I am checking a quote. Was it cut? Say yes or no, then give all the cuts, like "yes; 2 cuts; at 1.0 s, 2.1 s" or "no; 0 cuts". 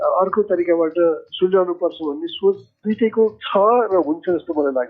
no; 0 cuts